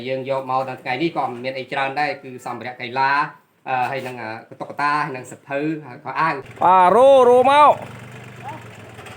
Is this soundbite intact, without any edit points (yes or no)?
no